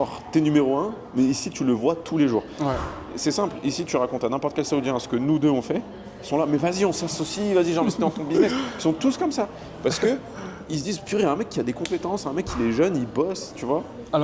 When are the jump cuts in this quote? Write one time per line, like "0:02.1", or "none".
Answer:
none